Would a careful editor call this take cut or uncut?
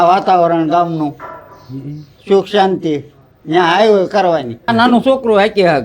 cut